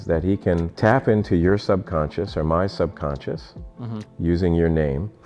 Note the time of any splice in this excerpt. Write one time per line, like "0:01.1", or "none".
none